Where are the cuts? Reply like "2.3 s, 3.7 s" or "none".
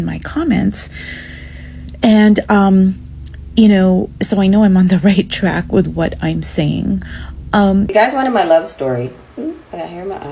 7.9 s